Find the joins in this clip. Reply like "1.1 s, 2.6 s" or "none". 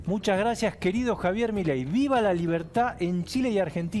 none

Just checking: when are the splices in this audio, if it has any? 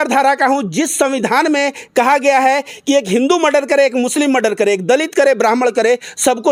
none

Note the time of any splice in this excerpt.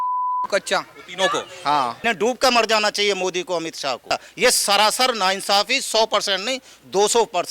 2.0 s, 4.2 s

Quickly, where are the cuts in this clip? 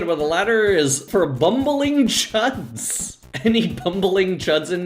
1.0 s

